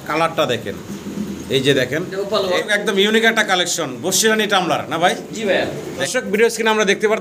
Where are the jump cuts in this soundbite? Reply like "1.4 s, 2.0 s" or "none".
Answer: 2.7 s, 6.0 s